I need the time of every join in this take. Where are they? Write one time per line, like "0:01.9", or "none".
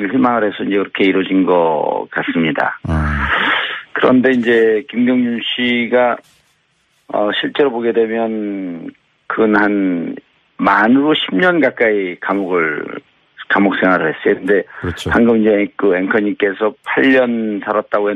0:05.2